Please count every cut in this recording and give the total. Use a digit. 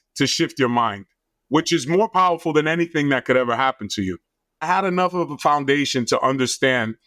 1